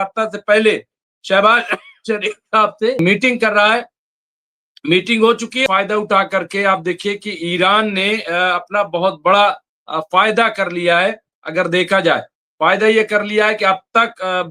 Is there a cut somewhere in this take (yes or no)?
yes